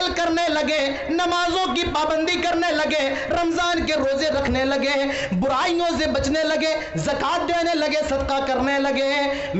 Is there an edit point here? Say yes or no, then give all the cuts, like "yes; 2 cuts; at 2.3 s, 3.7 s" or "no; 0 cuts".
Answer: no; 0 cuts